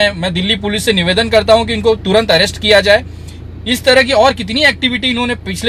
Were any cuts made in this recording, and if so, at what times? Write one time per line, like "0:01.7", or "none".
none